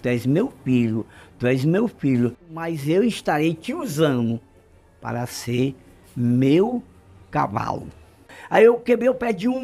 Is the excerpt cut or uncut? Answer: cut